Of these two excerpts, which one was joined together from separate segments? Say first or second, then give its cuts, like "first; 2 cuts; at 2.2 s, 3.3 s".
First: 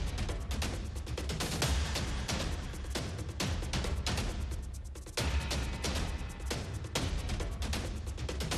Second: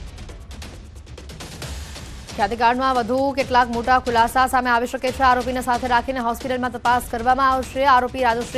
second; 2 cuts; at 2.2 s, 6.8 s